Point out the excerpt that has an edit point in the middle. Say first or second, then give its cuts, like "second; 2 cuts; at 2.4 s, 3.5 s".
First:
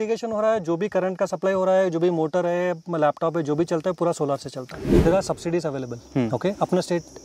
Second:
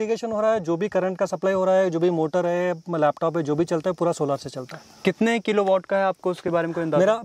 first; 1 cut; at 4.9 s